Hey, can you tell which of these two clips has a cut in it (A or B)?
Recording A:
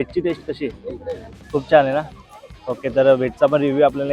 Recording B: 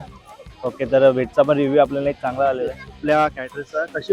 B